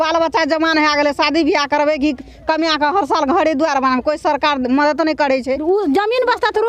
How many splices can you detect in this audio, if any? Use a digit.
1